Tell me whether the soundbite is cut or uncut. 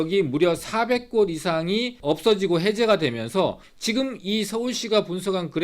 cut